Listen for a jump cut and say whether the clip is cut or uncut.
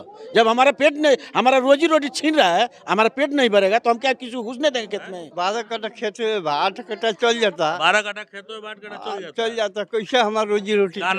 cut